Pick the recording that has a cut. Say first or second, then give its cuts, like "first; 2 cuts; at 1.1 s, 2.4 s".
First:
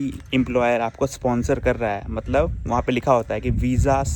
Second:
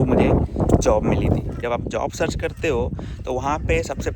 second; 1 cut; at 1.6 s